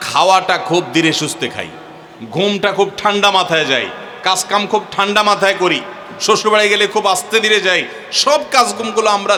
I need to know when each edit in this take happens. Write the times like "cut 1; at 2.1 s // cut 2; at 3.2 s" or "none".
none